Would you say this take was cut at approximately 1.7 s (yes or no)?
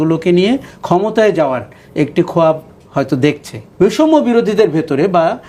no